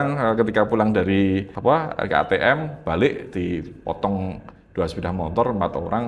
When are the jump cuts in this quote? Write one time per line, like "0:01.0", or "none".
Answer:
0:01.5